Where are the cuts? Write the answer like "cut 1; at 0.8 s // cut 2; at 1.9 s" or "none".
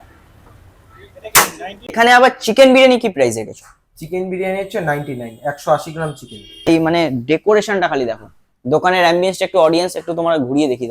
cut 1; at 1.9 s // cut 2; at 6.7 s